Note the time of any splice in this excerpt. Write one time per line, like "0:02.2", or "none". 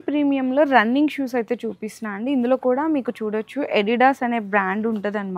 none